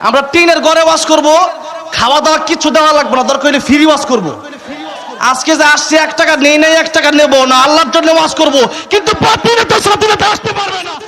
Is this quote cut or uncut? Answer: uncut